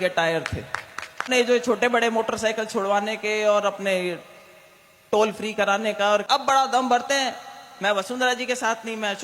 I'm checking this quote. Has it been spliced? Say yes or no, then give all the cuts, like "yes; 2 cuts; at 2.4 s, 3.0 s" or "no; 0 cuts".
yes; 2 cuts; at 1.2 s, 6.2 s